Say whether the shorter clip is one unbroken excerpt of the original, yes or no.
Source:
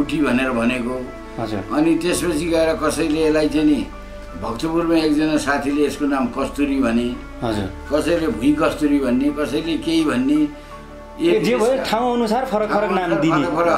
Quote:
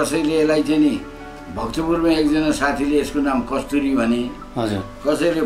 yes